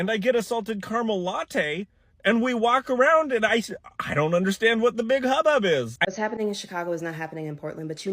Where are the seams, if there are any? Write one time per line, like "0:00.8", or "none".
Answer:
0:05.9